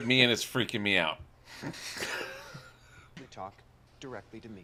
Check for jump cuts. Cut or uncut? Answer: uncut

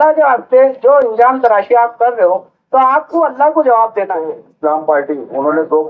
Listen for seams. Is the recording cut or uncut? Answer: cut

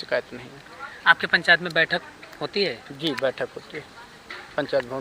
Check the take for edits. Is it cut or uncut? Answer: uncut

